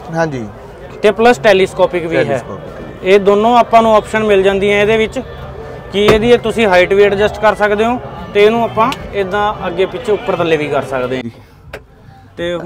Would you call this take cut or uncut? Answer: uncut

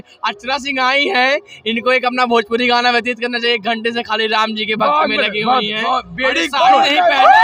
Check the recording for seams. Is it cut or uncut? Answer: uncut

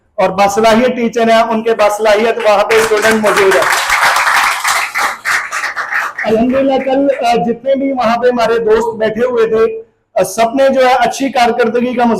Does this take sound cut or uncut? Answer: uncut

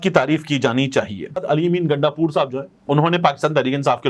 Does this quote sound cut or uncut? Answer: cut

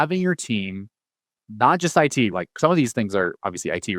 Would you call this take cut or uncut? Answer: cut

